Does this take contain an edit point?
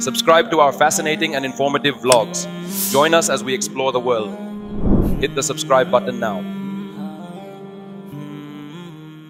no; 0 cuts

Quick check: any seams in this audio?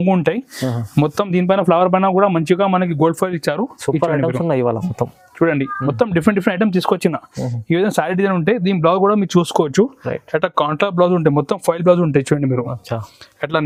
no; 0 cuts

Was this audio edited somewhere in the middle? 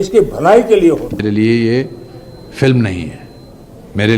yes; 1 cut; at 1.2 s

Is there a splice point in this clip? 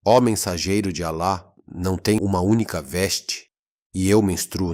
yes; 1 cut; at 2.2 s

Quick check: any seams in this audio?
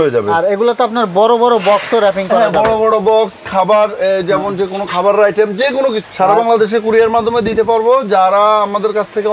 yes; 1 cut; at 6.0 s

